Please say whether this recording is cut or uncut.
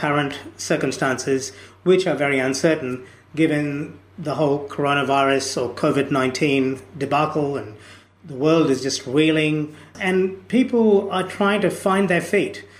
cut